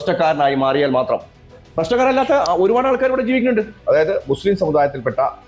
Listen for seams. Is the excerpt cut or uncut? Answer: cut